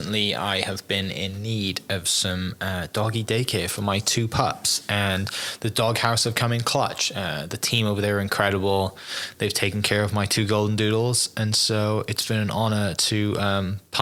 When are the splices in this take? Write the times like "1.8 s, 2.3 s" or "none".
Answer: none